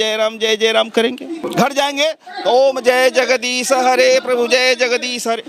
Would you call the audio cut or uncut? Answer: cut